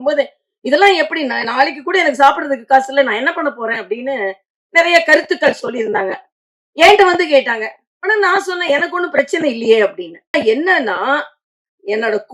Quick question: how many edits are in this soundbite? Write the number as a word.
one